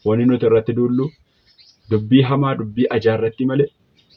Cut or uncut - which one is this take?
uncut